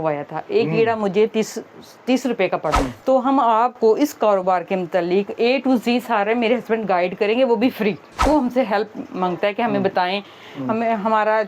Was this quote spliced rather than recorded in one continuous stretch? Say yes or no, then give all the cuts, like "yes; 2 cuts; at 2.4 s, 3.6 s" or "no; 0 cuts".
yes; 2 cuts; at 2.8 s, 8.2 s